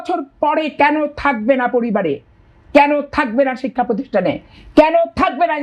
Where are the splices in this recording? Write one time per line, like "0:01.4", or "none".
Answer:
none